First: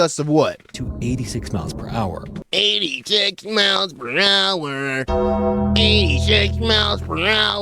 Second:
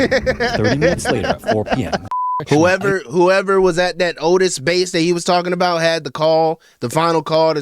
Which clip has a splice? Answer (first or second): second